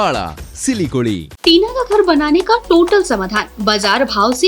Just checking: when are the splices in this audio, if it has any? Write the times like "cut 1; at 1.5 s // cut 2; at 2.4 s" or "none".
cut 1; at 1.3 s